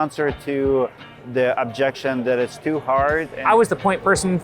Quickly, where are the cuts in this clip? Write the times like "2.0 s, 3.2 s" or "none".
3.3 s